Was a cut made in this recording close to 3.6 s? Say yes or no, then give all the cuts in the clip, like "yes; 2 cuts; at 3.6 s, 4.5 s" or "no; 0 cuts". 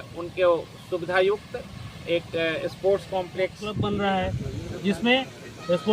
yes; 1 cut; at 3.6 s